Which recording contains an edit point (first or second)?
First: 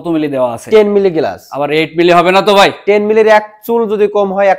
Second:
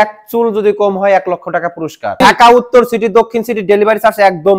second